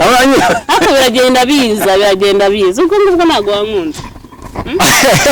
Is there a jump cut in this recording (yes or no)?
no